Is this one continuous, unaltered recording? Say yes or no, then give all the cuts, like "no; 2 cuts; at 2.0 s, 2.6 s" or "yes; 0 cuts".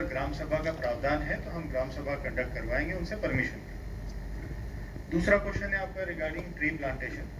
yes; 0 cuts